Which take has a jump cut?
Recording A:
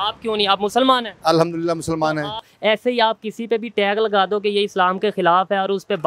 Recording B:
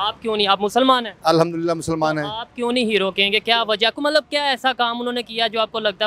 A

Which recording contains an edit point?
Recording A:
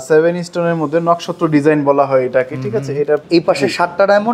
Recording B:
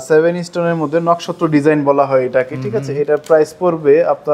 A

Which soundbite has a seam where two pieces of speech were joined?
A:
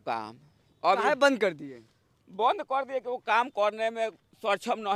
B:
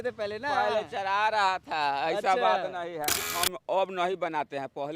B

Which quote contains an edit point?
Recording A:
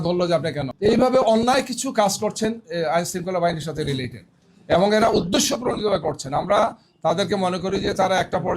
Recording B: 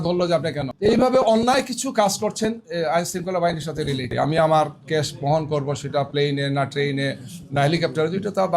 B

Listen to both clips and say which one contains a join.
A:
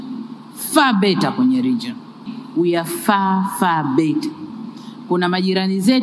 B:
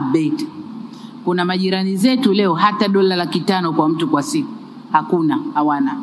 A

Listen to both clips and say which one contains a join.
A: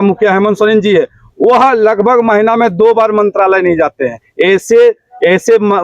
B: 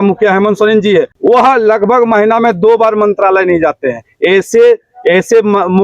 B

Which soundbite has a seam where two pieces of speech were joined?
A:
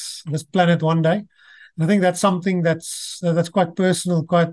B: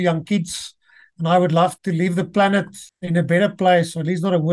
B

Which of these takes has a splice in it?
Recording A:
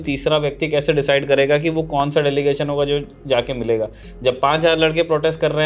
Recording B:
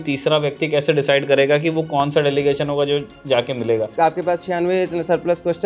B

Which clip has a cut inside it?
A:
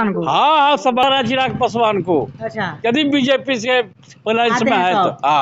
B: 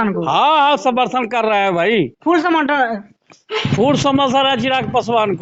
A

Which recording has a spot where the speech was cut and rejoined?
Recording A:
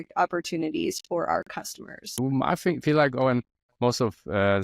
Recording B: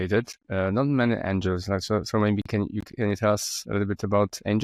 A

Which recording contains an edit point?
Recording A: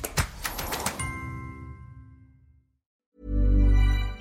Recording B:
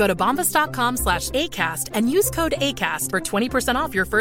A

